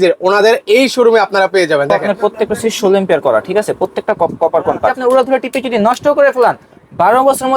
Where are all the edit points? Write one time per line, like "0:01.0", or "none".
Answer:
0:02.0
0:05.0